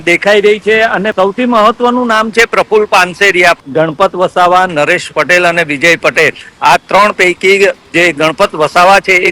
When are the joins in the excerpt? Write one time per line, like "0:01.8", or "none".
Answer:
0:01.1
0:03.6